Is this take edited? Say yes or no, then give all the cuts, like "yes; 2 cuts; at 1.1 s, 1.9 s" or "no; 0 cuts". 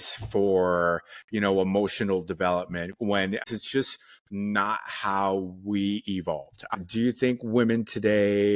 yes; 2 cuts; at 3.5 s, 6.6 s